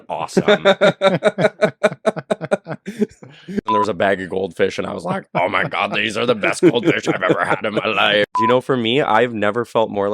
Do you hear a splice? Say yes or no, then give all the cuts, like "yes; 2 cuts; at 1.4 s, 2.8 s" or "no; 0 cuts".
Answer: yes; 2 cuts; at 3.7 s, 8.4 s